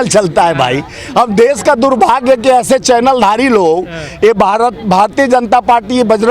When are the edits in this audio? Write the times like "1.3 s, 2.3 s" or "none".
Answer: none